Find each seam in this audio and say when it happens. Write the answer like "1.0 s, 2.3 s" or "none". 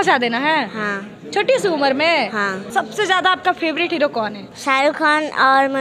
2.6 s, 4.5 s